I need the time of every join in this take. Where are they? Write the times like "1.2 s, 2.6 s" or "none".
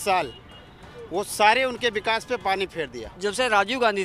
3.0 s